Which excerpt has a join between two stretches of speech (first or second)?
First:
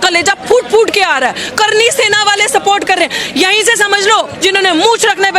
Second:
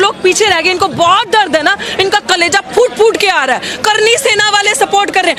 first